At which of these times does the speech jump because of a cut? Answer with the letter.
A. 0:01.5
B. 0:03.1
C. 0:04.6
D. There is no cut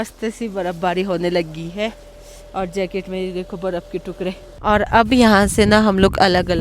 C